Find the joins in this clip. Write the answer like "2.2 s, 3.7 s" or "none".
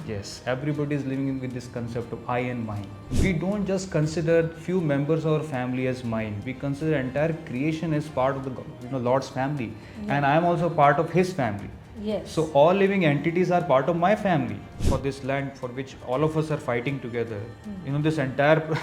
3.0 s, 14.8 s